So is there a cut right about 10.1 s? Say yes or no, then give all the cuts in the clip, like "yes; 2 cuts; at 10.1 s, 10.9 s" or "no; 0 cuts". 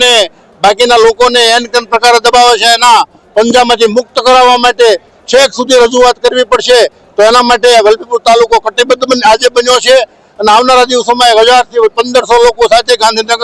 no; 0 cuts